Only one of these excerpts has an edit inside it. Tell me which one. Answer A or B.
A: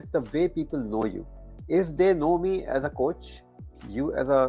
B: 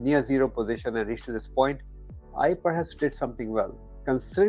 A